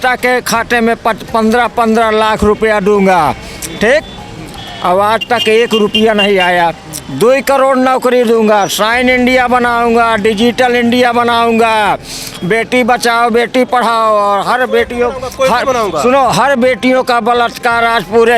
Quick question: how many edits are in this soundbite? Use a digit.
0